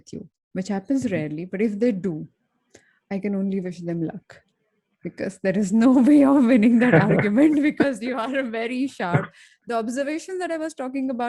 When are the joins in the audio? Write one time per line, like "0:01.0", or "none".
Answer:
none